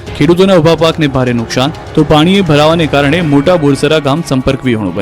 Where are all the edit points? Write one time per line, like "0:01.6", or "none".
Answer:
none